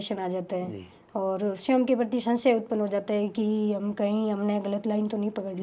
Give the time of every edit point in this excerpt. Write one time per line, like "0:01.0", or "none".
none